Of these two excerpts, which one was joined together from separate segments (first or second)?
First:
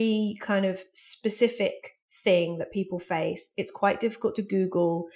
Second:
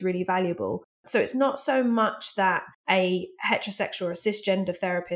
second